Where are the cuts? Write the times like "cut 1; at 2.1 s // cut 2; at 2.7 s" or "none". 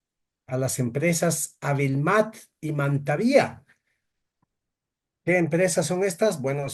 none